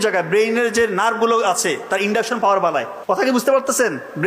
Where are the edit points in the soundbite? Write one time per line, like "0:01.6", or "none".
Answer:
0:03.2